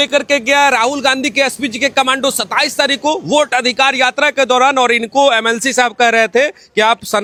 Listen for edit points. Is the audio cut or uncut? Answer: uncut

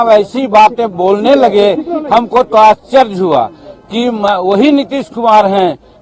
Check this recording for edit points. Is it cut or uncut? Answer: uncut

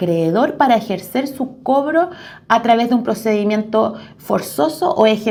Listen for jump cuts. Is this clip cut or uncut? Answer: uncut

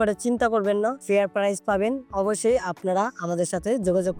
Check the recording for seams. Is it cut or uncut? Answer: uncut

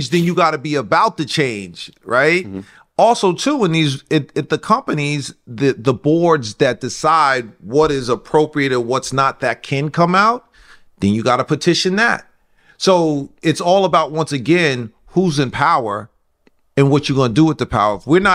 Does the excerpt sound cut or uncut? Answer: uncut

